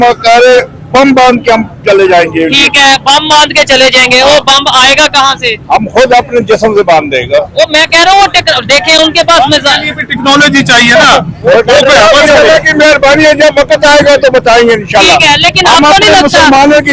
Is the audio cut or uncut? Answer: uncut